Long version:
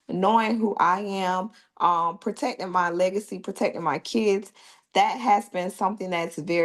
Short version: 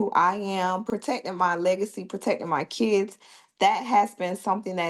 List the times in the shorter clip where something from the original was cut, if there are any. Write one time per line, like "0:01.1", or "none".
0:00.9